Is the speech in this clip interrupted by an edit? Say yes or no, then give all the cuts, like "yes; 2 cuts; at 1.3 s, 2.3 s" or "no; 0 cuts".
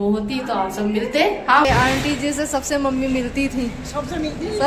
yes; 1 cut; at 1.6 s